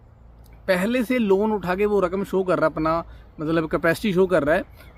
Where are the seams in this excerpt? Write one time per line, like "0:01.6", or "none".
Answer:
none